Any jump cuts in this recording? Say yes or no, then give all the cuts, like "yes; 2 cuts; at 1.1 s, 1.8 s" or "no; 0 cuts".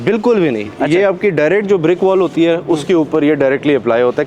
no; 0 cuts